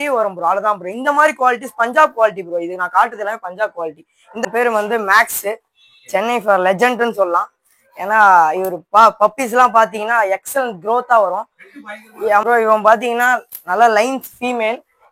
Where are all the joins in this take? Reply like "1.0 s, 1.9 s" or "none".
4.4 s, 12.4 s